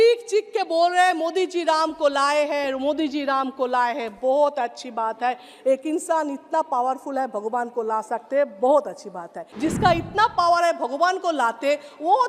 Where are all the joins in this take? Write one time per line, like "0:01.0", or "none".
0:09.4